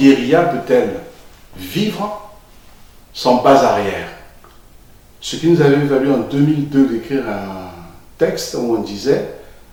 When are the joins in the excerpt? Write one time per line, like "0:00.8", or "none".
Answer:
none